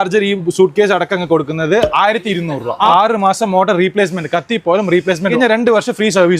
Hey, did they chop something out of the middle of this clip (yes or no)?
yes